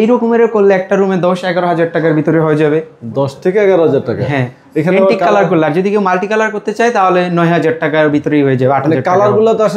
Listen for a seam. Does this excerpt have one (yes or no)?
no